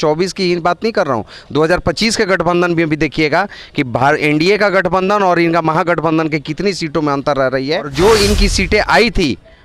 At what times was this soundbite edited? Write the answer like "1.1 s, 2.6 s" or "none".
7.9 s